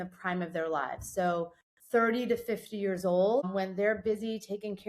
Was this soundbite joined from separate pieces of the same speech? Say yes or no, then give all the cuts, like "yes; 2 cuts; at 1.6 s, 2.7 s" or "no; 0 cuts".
yes; 1 cut; at 3.5 s